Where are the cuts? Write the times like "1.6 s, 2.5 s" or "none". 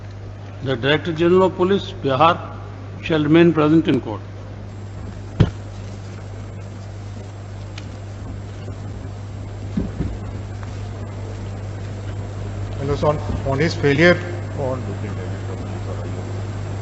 none